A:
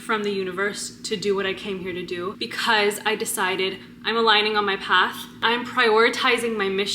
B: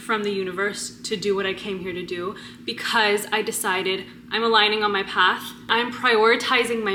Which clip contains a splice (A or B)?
A